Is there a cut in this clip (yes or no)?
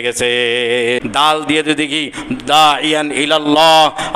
yes